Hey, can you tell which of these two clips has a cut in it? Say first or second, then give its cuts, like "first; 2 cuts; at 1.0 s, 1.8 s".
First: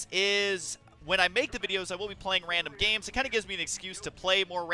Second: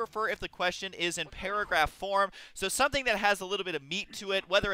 second; 1 cut; at 1.3 s